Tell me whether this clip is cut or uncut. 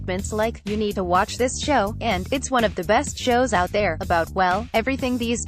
uncut